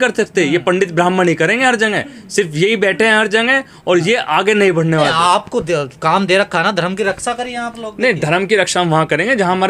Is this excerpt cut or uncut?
uncut